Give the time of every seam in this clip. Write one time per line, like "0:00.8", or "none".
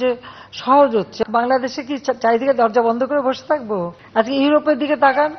0:01.2
0:04.0